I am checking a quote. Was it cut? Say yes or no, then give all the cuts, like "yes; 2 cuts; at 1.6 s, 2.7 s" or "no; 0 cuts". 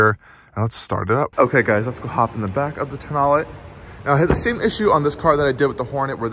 yes; 1 cut; at 1.3 s